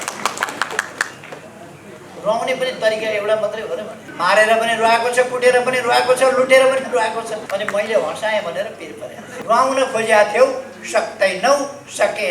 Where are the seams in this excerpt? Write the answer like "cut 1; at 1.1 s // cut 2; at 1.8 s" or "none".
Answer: cut 1; at 4.0 s // cut 2; at 7.4 s // cut 3; at 9.3 s